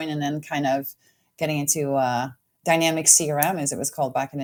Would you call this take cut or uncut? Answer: uncut